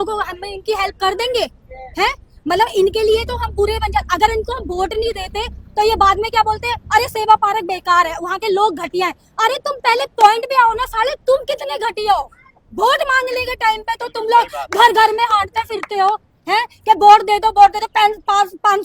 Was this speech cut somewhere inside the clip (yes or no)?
no